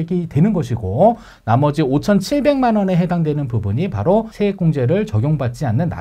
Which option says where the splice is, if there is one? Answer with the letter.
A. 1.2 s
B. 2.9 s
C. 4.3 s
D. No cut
C